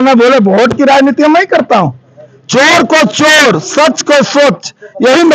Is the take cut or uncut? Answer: uncut